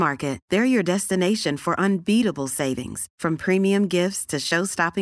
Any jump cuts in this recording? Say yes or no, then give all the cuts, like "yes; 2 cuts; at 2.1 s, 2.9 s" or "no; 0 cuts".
no; 0 cuts